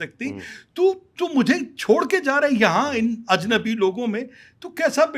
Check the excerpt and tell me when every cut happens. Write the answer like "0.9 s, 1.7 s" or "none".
none